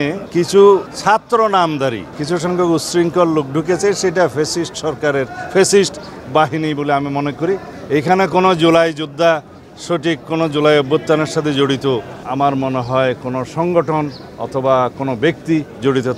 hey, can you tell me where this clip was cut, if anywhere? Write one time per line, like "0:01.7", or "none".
0:00.9
0:02.1
0:07.7